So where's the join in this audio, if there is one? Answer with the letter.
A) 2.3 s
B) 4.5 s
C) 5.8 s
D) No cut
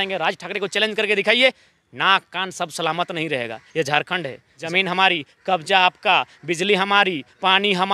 B